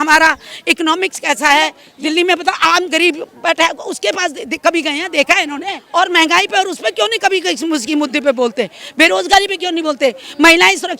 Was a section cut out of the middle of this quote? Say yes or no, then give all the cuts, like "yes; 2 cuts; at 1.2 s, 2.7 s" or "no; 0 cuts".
yes; 2 cuts; at 1.9 s, 5.8 s